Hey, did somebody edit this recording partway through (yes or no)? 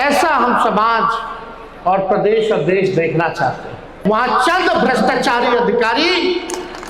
yes